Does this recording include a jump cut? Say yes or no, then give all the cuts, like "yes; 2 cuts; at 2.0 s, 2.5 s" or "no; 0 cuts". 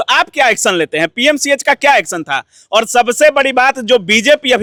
no; 0 cuts